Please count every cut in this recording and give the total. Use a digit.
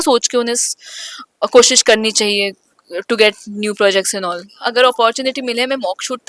1